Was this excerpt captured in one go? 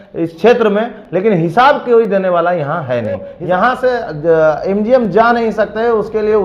no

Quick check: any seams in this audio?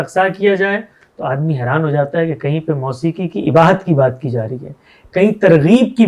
no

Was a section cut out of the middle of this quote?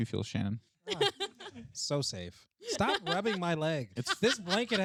no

